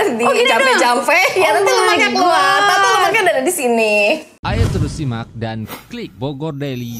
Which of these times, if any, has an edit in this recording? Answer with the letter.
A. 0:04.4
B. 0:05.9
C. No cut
A